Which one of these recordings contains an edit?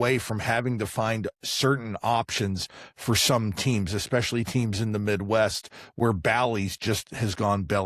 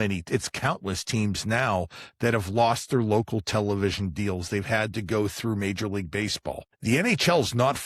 second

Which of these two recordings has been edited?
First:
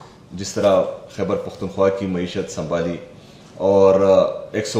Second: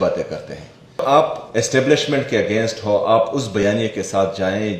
second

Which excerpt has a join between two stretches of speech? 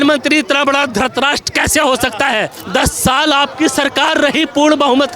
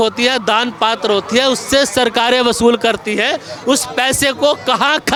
first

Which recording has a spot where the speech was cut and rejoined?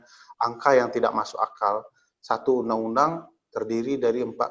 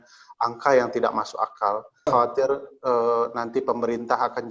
second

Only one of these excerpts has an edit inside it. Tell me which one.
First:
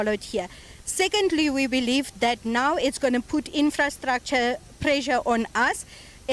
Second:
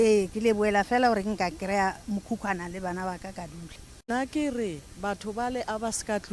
second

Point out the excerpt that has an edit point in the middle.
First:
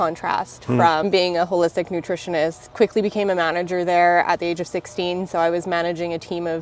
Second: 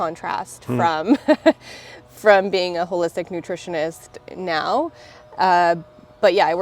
first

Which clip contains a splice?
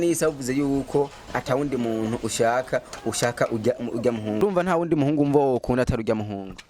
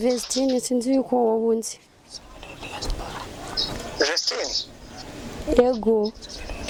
first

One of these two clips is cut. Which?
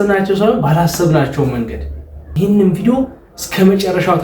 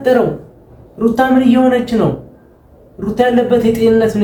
first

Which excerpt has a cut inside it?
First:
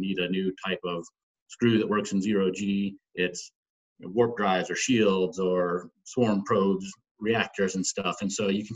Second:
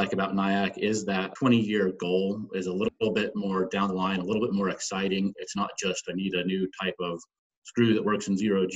second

